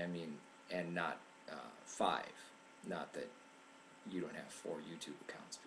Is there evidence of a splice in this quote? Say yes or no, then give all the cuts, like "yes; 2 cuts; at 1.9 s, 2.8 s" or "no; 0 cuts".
yes; 1 cut; at 4.2 s